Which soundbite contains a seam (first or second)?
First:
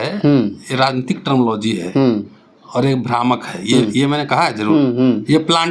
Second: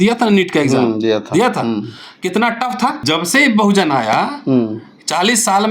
second